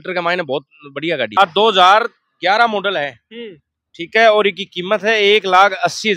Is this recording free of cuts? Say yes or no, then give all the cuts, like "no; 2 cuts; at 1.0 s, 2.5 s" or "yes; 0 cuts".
no; 1 cut; at 1.3 s